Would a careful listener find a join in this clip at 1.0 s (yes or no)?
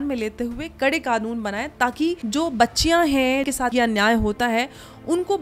no